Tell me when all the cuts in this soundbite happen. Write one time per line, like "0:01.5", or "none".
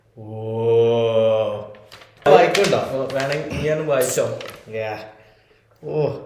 0:02.3